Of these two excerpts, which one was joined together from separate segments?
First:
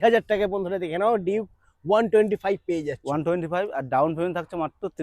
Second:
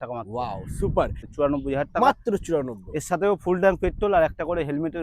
second; 1 cut; at 1.2 s

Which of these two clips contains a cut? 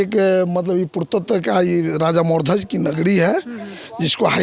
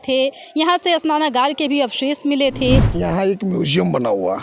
second; 1 cut; at 2.9 s

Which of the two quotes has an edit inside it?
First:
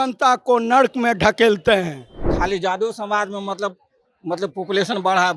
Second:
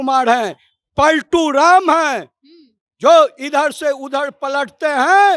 first; 1 cut; at 2.2 s

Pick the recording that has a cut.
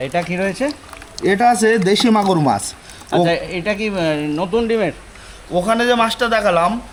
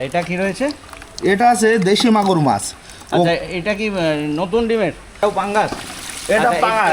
second; 1 cut; at 5.0 s

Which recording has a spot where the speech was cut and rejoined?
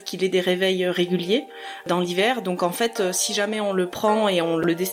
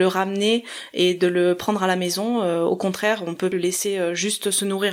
second; 1 cut; at 3.5 s

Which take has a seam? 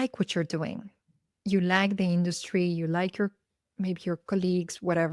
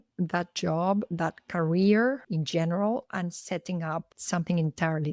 second; 2 cuts; at 2.2 s, 4.2 s

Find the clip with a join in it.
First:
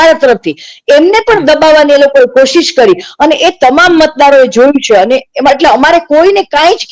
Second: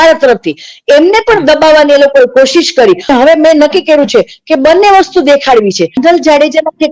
second; 2 cuts; at 3.1 s, 6.0 s

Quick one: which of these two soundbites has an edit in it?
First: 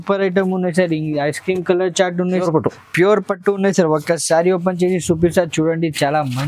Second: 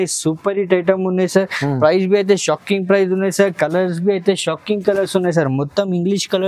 first; 1 cut; at 2.3 s

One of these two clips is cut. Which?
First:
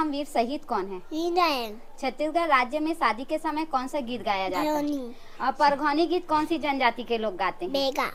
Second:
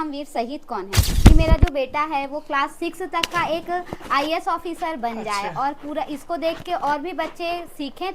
second; 1 cut; at 1.0 s

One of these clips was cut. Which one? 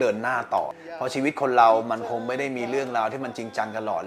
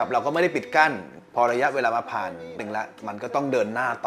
second; 2 cuts; at 1.1 s, 2.6 s

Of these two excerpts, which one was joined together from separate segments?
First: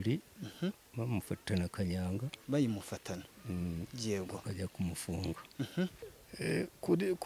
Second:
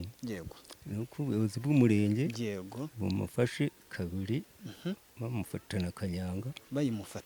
first; 1 cut; at 6.1 s

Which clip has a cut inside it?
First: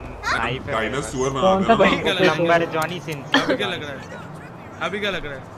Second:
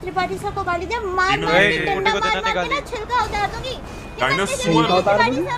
first; 1 cut; at 2.1 s

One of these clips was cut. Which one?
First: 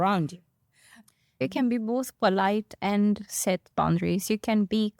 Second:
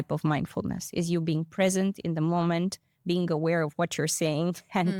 first; 1 cut; at 1.4 s

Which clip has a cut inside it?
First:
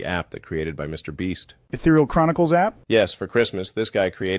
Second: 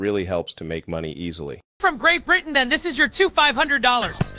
second; 1 cut; at 1.8 s

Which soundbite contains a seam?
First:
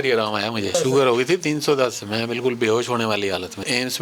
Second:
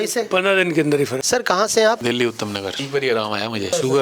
second; 1 cut; at 1.2 s

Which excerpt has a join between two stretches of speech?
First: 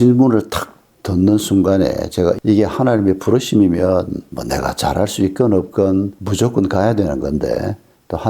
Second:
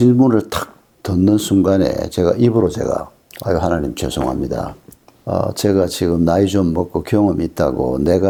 first; 1 cut; at 2.4 s

